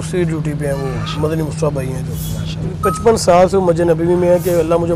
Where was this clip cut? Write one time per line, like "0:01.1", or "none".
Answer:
0:02.7

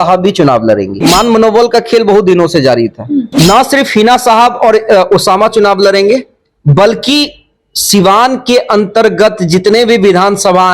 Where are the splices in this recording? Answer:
0:01.0
0:03.3

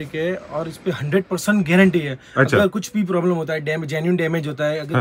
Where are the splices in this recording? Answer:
none

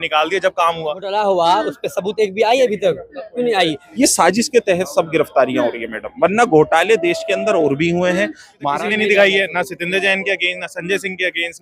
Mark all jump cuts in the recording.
0:01.0
0:03.8
0:08.7

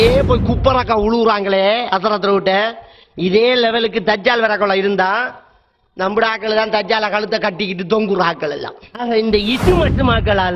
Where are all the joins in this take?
0:08.9

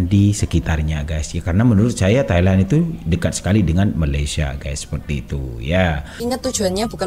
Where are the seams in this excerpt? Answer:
0:06.1

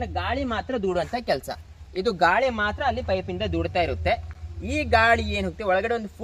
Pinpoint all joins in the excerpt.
none

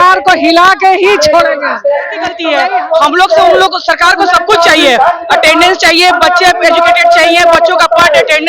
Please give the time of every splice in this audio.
0:02.4

